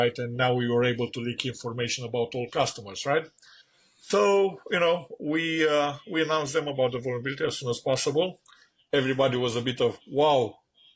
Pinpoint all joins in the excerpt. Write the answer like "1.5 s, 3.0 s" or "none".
none